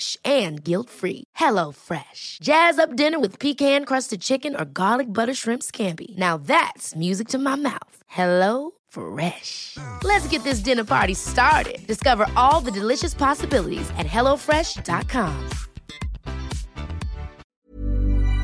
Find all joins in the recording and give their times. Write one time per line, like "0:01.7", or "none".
0:17.4